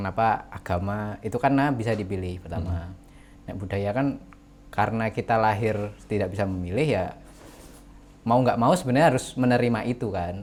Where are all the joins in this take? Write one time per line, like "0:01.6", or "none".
none